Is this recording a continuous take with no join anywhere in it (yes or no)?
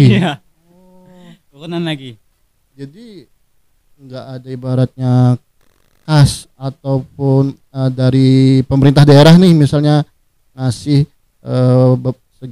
yes